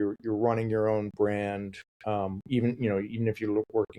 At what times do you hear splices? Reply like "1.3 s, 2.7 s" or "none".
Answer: none

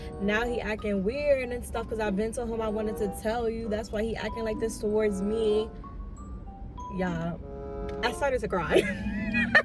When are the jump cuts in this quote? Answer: none

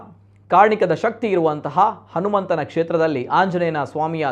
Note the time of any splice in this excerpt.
none

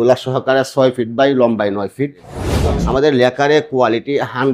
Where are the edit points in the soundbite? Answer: 2.4 s

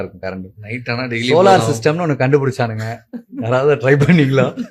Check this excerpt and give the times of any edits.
none

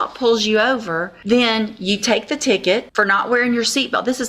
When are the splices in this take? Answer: 1.1 s, 2.9 s

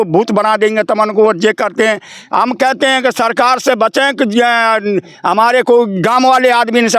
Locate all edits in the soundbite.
none

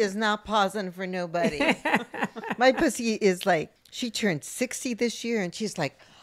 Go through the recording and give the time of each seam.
3.8 s

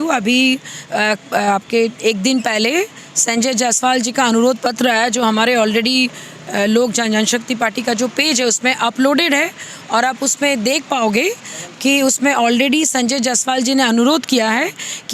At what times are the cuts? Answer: none

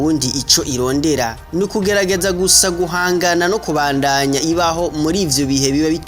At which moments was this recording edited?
1.4 s

